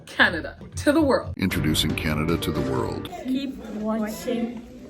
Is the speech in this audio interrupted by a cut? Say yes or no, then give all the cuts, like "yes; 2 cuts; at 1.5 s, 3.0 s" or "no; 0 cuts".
yes; 2 cuts; at 1.3 s, 3.1 s